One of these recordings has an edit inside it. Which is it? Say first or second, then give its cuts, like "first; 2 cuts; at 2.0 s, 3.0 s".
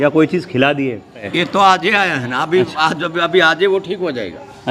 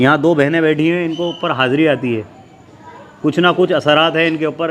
first; 1 cut; at 1.3 s